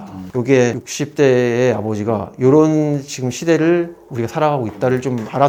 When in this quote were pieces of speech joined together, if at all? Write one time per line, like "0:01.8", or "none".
none